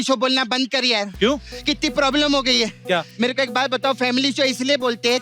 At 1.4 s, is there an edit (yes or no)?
no